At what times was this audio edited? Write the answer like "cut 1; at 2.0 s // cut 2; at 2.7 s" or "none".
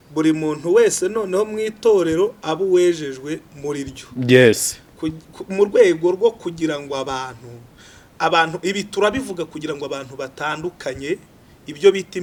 none